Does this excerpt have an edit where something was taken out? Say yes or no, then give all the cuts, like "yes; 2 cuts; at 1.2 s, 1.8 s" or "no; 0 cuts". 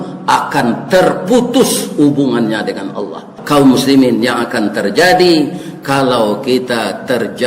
yes; 1 cut; at 3.3 s